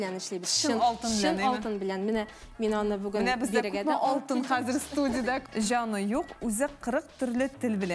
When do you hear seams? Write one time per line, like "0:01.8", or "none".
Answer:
0:05.4

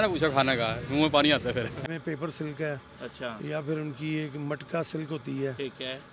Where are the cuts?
0:01.9

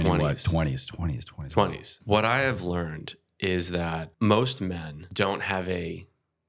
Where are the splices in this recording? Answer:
0:01.9
0:04.1
0:05.0

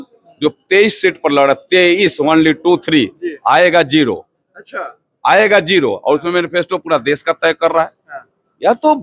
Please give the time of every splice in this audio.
none

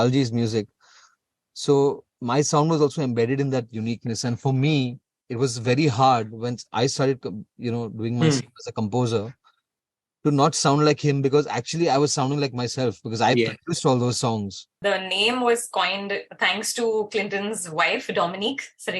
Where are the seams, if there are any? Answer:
0:02.1
0:14.8

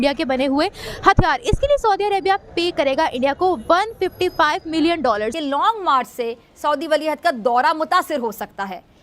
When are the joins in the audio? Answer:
0:05.4

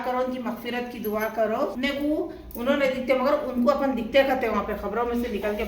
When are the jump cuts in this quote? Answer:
0:01.7

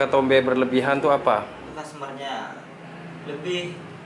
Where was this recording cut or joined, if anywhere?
0:01.7

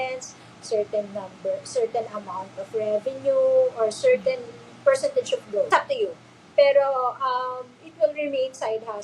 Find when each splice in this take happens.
0:05.7

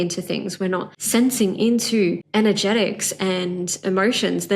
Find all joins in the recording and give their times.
0:00.9
0:02.2

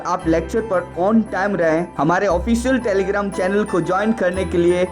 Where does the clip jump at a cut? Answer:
0:01.7

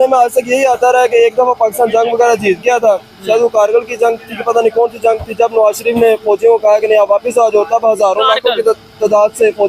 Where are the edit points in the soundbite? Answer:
none

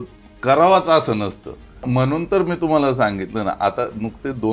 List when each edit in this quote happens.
0:01.8

